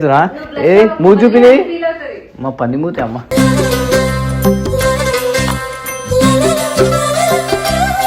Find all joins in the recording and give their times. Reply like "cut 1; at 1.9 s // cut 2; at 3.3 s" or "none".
none

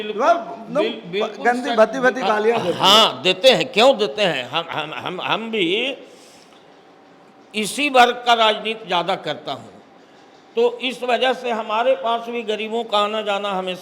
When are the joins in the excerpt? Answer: none

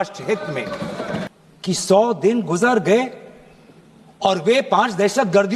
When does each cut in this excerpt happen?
cut 1; at 1.3 s

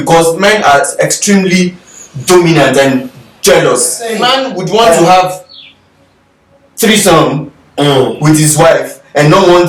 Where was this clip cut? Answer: none

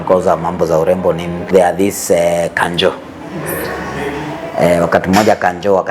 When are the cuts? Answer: cut 1; at 1.5 s

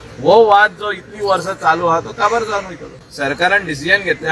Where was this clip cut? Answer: cut 1; at 2.8 s

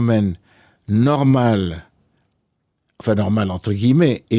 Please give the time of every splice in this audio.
none

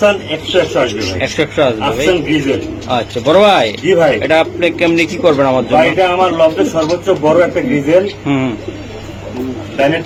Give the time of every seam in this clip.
none

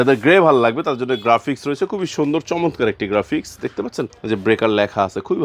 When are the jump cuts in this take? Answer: cut 1; at 4.2 s

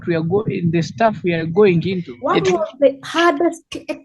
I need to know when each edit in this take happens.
cut 1; at 2.1 s

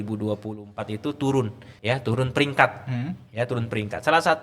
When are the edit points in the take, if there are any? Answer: cut 1; at 1.7 s

